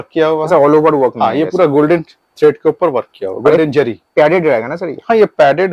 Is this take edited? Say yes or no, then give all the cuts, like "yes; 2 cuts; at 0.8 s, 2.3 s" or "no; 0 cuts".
no; 0 cuts